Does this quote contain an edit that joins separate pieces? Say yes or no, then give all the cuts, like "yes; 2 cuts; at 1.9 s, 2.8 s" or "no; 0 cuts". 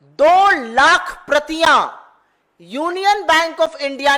no; 0 cuts